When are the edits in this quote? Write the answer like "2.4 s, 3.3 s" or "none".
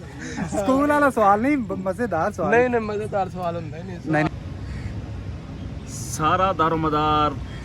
4.3 s